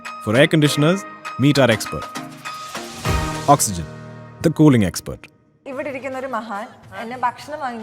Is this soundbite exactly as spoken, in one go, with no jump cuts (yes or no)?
no